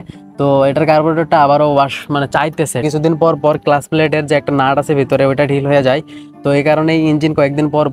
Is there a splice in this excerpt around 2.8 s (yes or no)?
yes